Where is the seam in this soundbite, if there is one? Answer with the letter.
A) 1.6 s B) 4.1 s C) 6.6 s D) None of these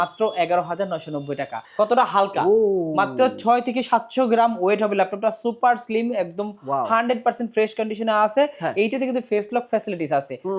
A